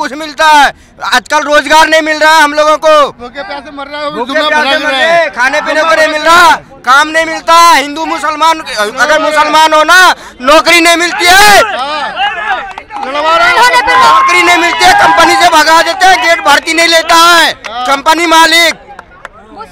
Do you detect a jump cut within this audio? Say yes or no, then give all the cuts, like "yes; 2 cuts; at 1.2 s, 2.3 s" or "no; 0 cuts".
no; 0 cuts